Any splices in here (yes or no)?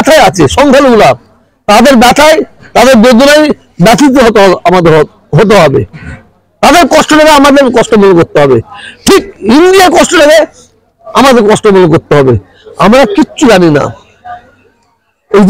no